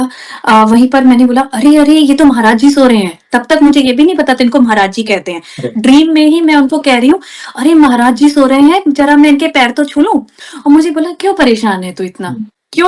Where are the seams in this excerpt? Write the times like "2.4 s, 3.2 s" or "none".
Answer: 10.4 s